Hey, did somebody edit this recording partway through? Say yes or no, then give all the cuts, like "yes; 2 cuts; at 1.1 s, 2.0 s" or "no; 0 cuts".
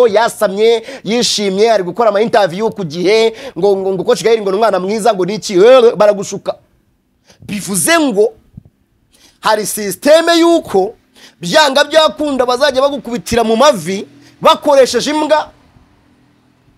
no; 0 cuts